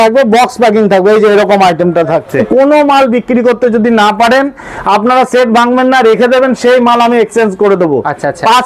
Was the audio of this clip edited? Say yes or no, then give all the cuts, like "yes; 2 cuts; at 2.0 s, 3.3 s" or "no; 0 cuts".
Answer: yes; 1 cut; at 2.4 s